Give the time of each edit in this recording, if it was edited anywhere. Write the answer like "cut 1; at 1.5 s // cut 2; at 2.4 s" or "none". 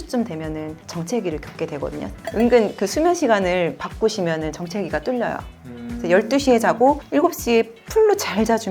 cut 1; at 2.2 s